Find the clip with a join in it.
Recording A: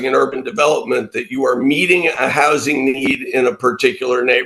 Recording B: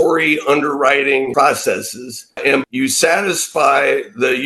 B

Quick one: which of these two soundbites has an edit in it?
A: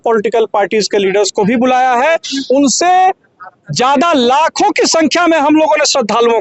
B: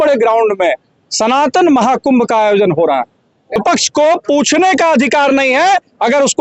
B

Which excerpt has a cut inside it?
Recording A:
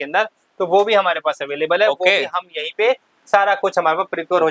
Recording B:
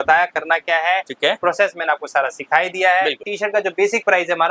B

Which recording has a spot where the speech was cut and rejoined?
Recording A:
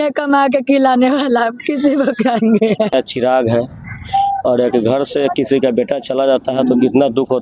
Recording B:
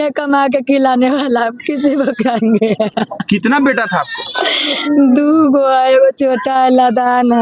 A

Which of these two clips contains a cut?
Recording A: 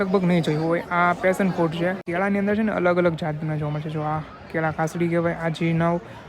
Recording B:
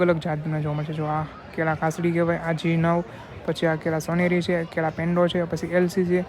A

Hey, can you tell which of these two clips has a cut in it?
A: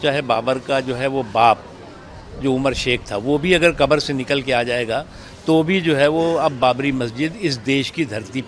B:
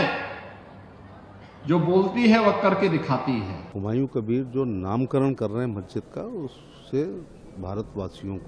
B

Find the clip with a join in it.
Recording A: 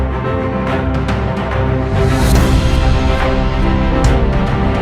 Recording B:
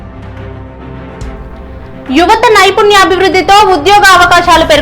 B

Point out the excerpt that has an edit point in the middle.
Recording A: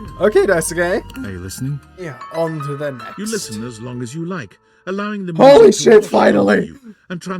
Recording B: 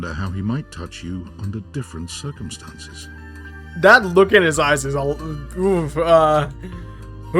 A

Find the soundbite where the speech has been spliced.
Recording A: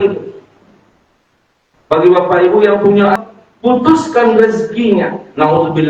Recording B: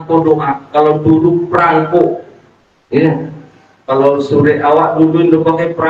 A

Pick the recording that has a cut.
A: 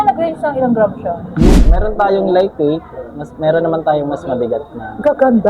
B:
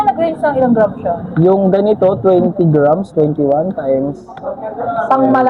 A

